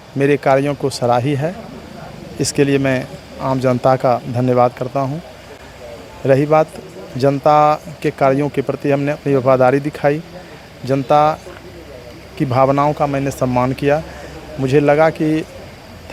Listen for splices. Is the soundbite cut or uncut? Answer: uncut